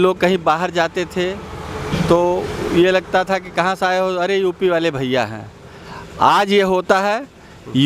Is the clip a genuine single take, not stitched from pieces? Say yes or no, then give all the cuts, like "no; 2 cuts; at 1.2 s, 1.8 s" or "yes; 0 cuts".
yes; 0 cuts